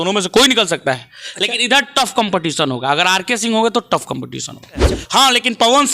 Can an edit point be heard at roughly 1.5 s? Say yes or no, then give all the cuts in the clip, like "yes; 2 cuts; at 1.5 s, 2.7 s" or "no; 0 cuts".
no; 1 cut; at 5.0 s